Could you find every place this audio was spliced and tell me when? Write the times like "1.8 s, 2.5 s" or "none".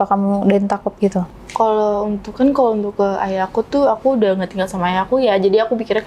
none